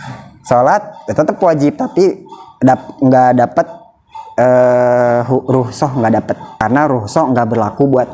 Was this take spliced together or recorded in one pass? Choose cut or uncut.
cut